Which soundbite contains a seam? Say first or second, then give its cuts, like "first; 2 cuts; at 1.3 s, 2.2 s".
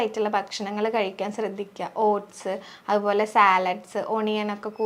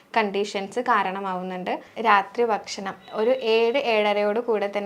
second; 1 cut; at 1.9 s